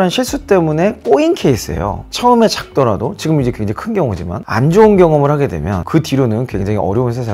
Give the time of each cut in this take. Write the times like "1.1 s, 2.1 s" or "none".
2.0 s, 5.8 s